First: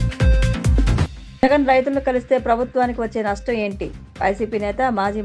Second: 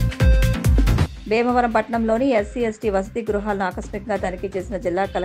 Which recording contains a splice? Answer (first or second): first